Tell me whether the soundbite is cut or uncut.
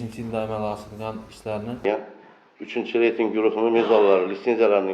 cut